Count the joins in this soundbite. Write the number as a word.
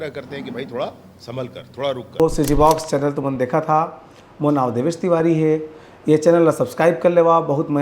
one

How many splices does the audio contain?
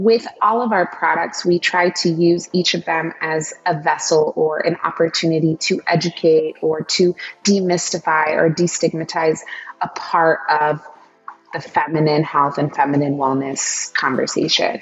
zero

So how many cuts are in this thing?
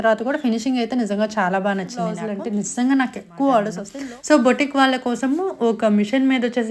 two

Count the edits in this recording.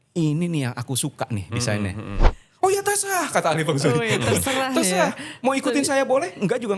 one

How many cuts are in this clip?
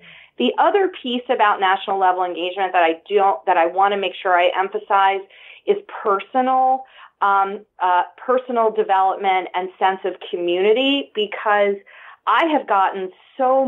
zero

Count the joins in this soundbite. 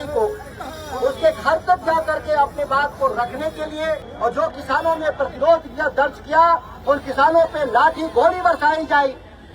one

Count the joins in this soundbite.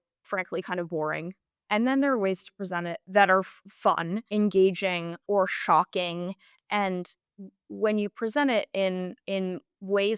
four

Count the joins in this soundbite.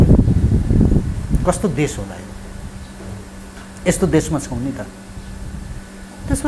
zero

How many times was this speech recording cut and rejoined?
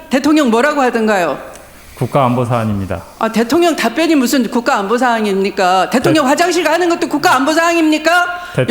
zero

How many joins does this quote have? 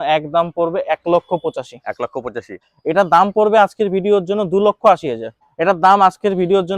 two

